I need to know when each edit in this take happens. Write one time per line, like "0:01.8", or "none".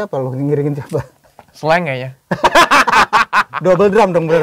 none